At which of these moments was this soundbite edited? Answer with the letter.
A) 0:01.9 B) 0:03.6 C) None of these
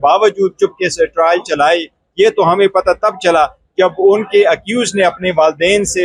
C